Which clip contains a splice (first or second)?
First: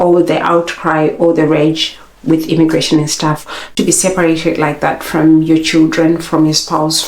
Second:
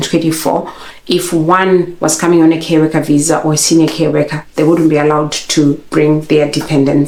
first